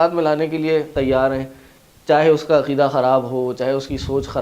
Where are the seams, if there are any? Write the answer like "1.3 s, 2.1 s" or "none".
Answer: 0.9 s